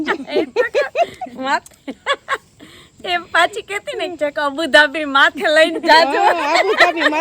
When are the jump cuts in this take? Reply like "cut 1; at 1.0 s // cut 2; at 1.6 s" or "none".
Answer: none

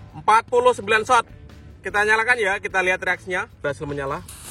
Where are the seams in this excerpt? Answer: cut 1; at 3.6 s

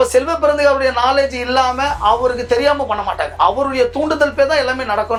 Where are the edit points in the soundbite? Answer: none

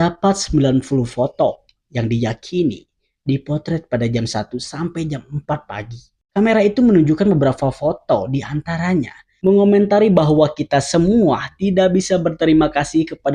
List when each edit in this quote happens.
cut 1; at 9.3 s

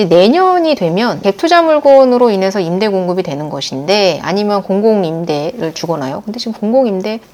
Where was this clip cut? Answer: none

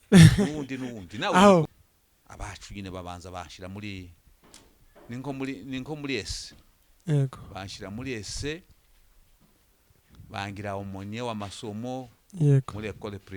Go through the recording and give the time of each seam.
cut 1; at 1.8 s

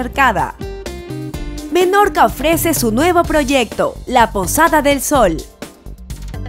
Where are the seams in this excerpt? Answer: cut 1; at 5.5 s

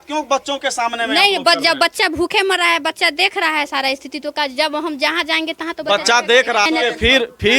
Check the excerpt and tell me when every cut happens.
cut 1; at 6.7 s

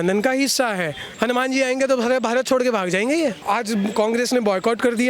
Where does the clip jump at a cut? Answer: cut 1; at 1.0 s // cut 2; at 3.4 s

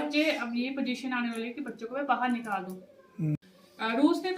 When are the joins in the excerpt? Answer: cut 1; at 3.4 s

